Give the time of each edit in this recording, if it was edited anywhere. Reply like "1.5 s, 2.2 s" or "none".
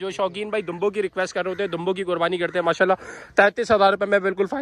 none

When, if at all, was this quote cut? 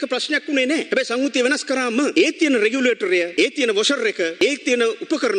0.9 s, 2.1 s, 3.3 s, 4.4 s

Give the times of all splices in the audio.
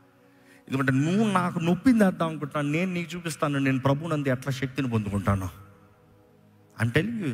none

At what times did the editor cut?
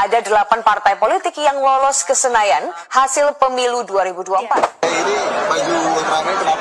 4.7 s

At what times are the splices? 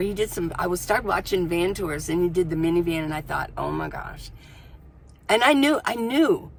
none

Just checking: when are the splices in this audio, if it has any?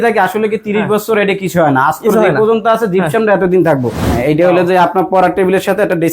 4.0 s

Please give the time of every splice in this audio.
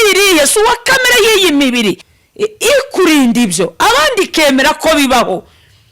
2.1 s

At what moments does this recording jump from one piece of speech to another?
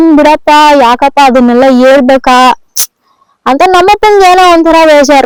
none

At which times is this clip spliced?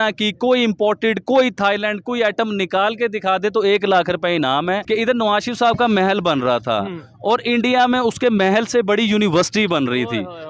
4.8 s

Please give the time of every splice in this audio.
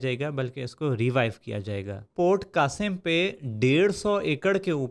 2.1 s

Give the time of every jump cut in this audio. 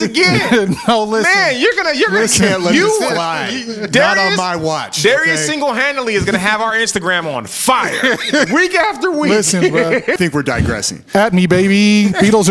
10.2 s

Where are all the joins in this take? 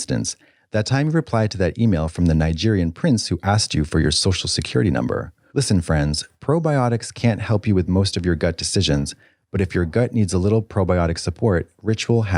5.4 s

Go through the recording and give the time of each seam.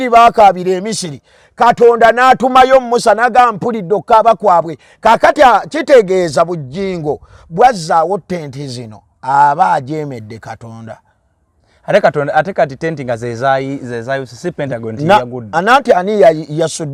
none

